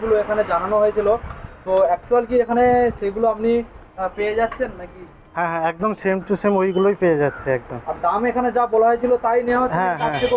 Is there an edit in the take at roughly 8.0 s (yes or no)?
no